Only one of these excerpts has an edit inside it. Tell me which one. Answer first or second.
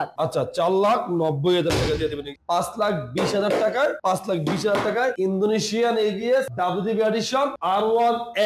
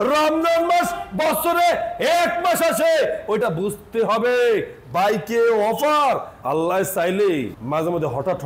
first